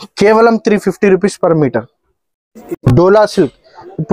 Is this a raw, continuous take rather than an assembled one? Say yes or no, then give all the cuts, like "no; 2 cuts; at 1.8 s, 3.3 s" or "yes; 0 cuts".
yes; 0 cuts